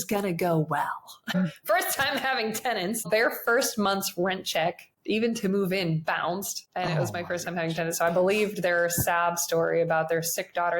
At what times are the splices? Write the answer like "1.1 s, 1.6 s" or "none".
1.3 s, 3.1 s, 4.9 s, 6.6 s